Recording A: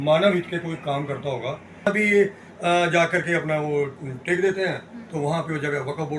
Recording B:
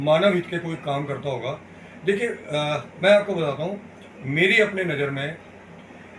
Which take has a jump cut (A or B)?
A